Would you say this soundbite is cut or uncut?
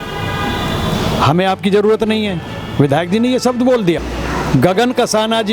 cut